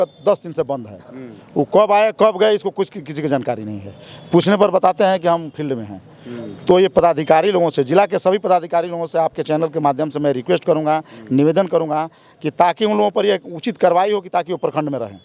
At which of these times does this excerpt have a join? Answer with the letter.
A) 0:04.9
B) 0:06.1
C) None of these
C